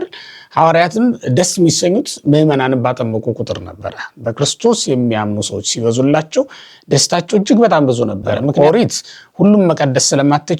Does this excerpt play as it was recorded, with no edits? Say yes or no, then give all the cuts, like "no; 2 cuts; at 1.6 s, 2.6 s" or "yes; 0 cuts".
no; 1 cut; at 8.5 s